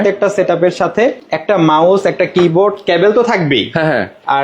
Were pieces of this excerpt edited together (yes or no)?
yes